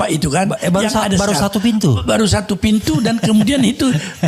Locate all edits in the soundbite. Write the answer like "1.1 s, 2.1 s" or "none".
none